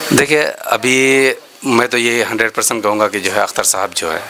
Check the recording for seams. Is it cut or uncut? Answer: uncut